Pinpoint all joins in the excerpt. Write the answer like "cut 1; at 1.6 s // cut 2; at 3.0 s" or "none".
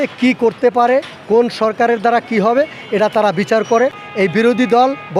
cut 1; at 4.0 s